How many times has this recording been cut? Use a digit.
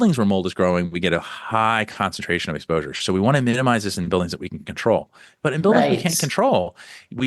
0